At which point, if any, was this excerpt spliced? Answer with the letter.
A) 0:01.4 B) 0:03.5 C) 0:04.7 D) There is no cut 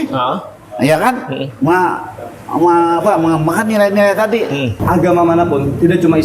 C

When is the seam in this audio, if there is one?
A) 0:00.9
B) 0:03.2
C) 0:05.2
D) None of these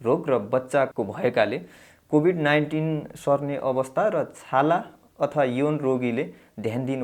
A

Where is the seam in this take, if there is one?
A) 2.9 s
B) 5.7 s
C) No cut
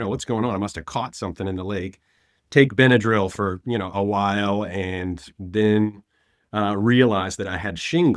C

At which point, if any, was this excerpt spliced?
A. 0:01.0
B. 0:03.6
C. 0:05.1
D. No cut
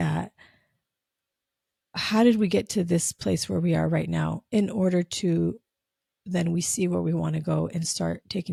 D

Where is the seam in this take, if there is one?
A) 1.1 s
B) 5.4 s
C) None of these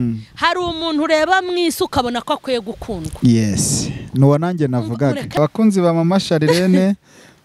B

